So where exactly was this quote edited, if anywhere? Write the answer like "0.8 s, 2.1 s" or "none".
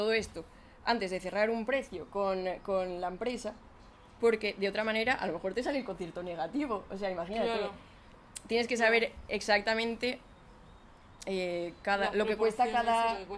none